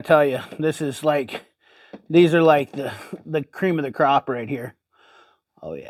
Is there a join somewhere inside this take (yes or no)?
no